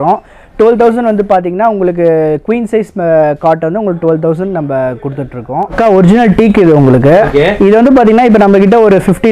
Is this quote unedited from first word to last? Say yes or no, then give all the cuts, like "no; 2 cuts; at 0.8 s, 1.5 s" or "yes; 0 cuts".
no; 1 cut; at 5.8 s